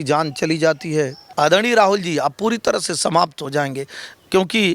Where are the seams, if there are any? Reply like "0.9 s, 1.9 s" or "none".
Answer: 1.2 s

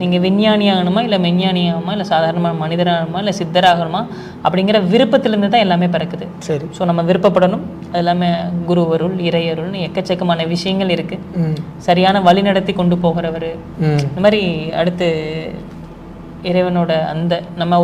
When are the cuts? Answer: none

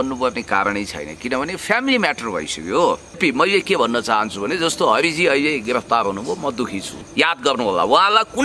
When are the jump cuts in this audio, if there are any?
3.2 s, 7.0 s

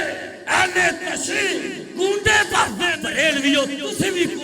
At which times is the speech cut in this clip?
3.0 s

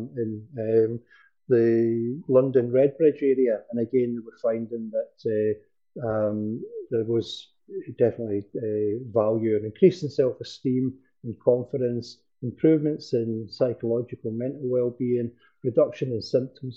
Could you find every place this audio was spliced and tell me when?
none

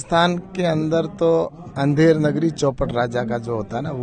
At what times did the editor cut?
none

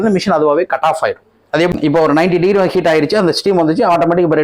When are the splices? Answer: 1.6 s

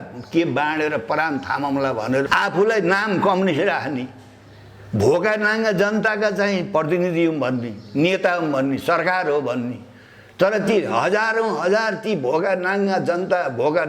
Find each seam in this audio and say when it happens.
2.3 s

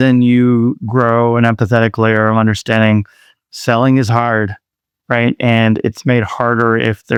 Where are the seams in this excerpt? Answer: none

